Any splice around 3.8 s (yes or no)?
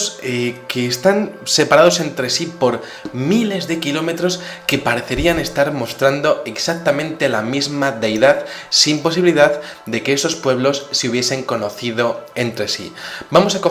yes